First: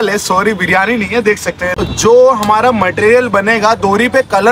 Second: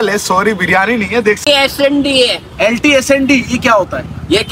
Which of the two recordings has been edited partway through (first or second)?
second